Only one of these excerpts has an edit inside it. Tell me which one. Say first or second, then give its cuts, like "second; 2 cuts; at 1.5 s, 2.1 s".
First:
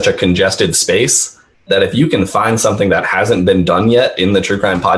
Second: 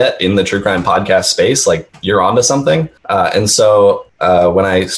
second; 3 cuts; at 1.9 s, 3.0 s, 4.1 s